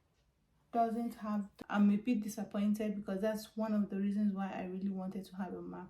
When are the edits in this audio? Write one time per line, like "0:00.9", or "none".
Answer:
0:01.5